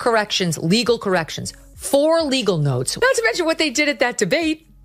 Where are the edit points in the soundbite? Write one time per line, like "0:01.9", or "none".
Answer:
0:02.9

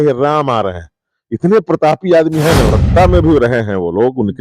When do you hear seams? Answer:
0:02.7

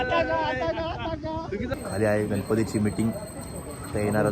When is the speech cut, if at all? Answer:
0:01.7

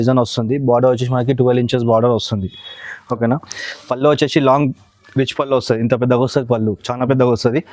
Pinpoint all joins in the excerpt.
0:03.5

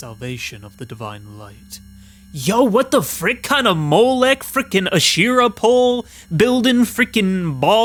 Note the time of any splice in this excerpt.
none

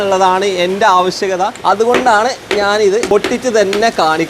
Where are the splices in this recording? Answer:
0:01.6
0:03.1

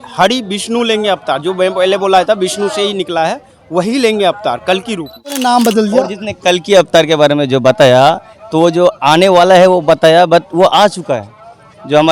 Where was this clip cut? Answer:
0:05.4

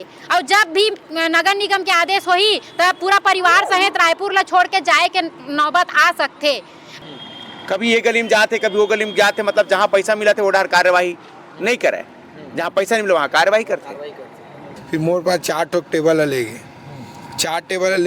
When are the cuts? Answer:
0:06.9
0:14.7

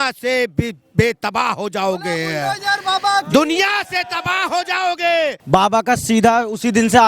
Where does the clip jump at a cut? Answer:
0:05.5

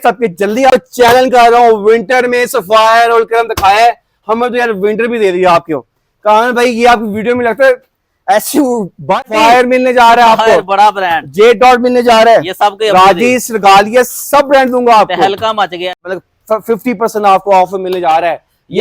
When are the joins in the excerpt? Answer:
0:00.7
0:09.2
0:15.9

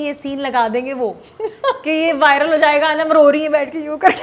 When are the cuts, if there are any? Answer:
none

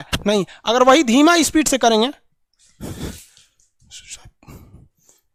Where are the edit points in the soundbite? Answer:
none

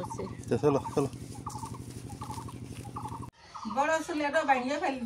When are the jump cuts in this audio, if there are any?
0:03.3

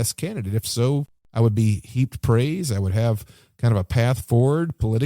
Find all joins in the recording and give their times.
0:01.2

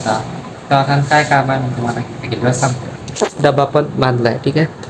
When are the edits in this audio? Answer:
none

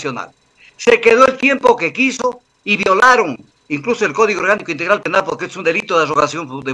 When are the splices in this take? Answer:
none

